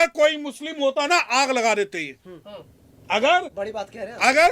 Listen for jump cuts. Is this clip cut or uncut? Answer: cut